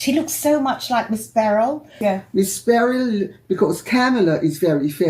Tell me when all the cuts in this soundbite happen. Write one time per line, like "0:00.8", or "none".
0:02.0